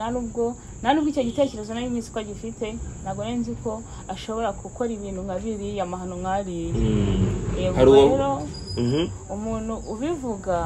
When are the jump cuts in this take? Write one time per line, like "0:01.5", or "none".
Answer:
none

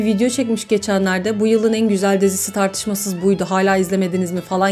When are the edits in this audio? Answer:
none

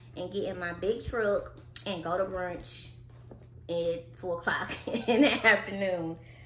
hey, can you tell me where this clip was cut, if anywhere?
none

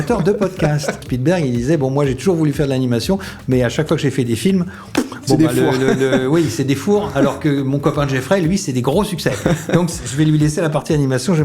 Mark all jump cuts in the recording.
0:01.1

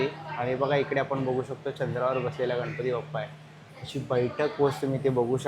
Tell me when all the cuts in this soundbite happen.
none

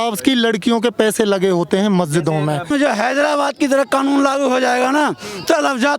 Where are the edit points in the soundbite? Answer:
0:02.7

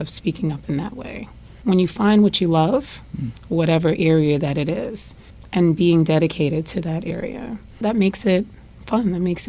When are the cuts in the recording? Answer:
0:01.5

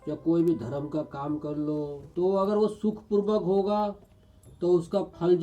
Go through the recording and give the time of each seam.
0:02.0
0:04.4

